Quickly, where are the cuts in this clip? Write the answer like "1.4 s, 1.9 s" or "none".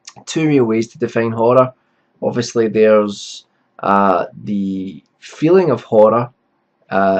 none